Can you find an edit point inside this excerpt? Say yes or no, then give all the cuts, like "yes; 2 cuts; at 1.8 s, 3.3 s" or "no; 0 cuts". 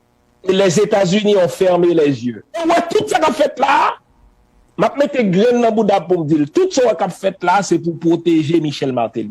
yes; 1 cut; at 2.6 s